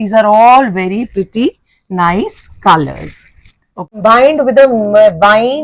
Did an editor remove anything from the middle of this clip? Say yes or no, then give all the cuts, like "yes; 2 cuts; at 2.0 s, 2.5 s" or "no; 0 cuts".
yes; 1 cut; at 4.0 s